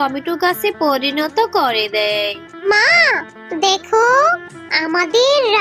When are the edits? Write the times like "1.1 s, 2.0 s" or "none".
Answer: 2.7 s